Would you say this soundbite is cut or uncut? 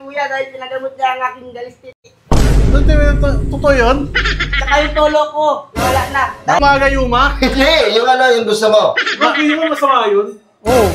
cut